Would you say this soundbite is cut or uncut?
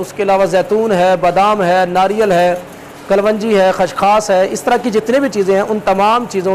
uncut